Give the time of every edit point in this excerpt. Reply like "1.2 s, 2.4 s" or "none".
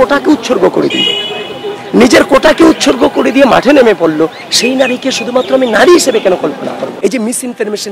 6.9 s